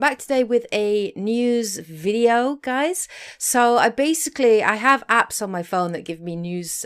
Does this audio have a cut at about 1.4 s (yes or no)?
no